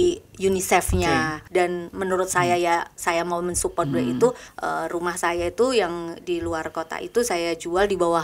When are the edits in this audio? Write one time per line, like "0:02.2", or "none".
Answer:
0:01.4
0:04.5